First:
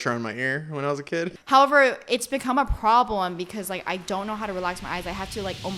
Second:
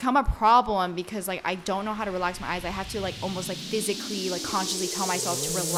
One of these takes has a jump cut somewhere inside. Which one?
first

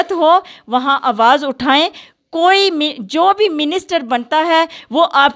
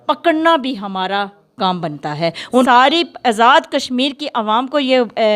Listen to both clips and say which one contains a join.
second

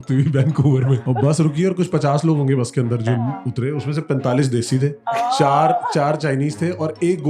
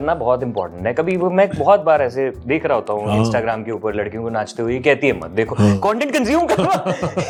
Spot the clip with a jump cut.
first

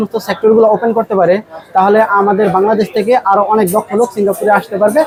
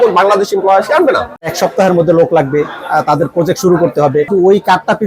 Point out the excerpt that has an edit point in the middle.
second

